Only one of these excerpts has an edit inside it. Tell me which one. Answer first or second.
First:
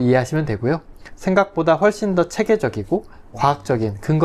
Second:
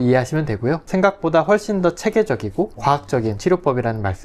second